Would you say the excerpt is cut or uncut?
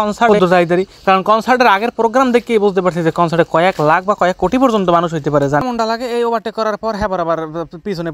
cut